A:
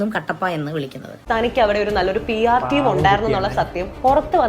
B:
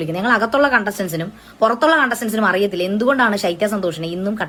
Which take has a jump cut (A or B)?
A